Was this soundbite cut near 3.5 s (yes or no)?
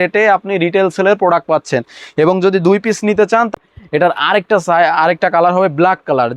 yes